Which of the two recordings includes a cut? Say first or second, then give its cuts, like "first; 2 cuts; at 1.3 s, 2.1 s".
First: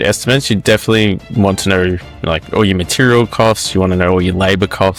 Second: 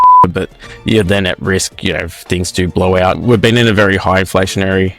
second; 1 cut; at 3.2 s